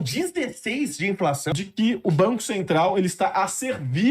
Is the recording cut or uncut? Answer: cut